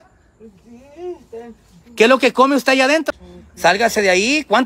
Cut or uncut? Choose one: cut